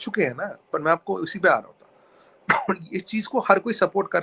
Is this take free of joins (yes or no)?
yes